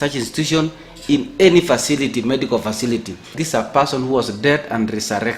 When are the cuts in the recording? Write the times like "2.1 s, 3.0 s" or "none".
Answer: 3.2 s